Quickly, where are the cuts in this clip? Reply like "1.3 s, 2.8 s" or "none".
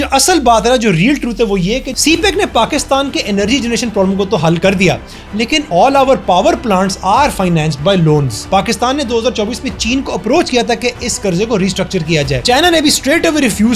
1.9 s, 5.5 s, 8.4 s, 12.4 s